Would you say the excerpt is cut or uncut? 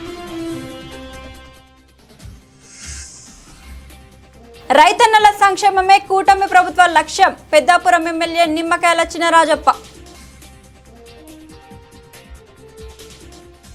uncut